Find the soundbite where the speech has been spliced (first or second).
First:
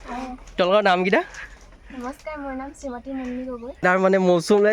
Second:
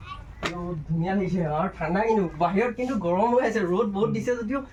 first